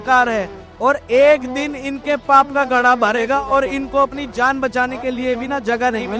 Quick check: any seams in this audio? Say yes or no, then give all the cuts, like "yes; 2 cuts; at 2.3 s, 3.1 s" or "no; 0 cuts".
no; 0 cuts